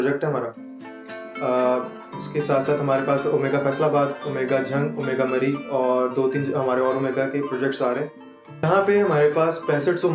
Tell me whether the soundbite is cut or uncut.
cut